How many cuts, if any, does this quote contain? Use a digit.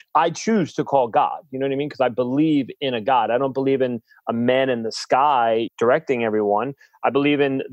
1